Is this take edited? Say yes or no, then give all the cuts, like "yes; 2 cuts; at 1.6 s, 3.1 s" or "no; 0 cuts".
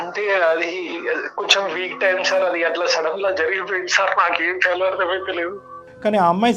no; 0 cuts